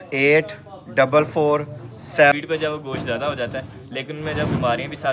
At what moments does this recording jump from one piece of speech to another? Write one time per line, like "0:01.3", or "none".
0:02.3